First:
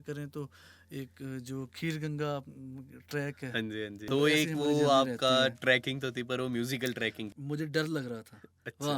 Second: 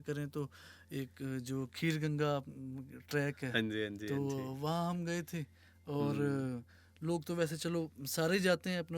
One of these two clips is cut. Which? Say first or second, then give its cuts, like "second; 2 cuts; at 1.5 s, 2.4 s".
first; 2 cuts; at 4.1 s, 7.3 s